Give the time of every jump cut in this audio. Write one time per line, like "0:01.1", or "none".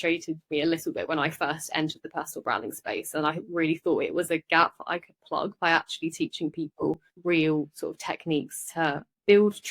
0:07.1